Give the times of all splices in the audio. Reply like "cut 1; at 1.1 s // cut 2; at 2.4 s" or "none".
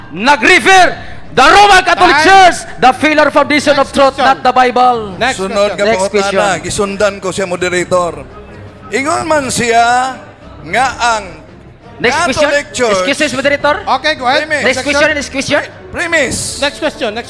cut 1; at 2.6 s

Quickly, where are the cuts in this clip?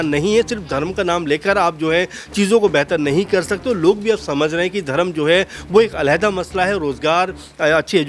none

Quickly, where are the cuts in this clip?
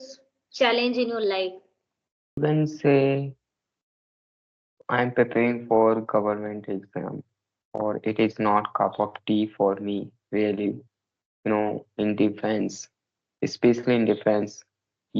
cut 1; at 2.4 s

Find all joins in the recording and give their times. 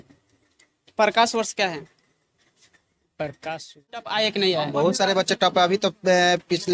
cut 1; at 4.1 s

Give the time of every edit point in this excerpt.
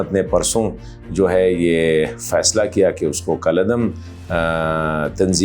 none

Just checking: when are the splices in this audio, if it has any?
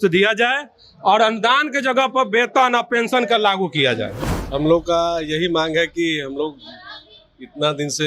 cut 1; at 4.3 s

